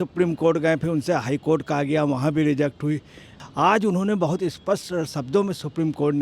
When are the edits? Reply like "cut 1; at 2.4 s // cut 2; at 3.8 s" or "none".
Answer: cut 1; at 3.3 s

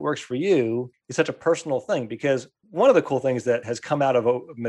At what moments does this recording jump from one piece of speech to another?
cut 1; at 1.0 s // cut 2; at 2.6 s // cut 3; at 3.6 s

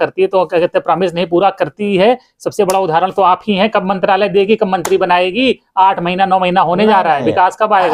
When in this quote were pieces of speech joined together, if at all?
none

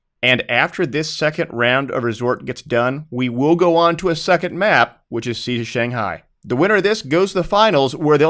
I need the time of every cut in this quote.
cut 1; at 5.0 s

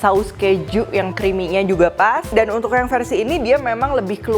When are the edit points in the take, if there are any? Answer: cut 1; at 1.1 s // cut 2; at 2.2 s

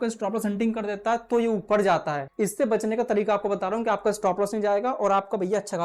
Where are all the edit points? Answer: cut 1; at 2.2 s

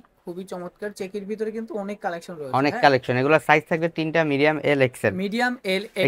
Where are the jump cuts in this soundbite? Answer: none

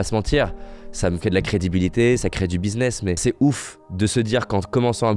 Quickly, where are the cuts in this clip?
none

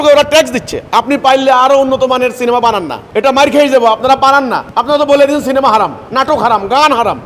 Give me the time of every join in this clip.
none

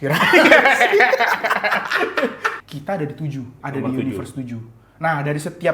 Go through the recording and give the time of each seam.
cut 1; at 2.5 s // cut 2; at 3.6 s

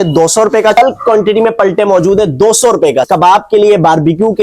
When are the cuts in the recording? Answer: cut 1; at 0.8 s // cut 2; at 3.1 s

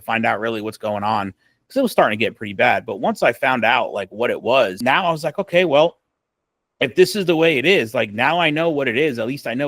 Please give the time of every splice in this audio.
cut 1; at 4.8 s

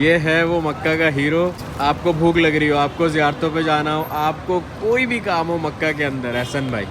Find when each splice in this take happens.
cut 1; at 1.7 s

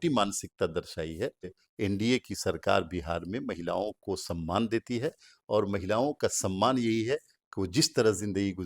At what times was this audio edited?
cut 1; at 1.6 s

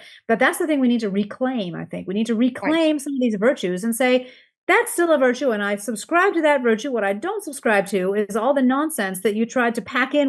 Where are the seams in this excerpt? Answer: none

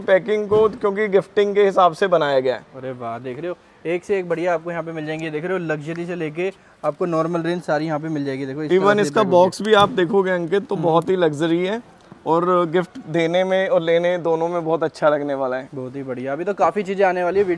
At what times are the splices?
none

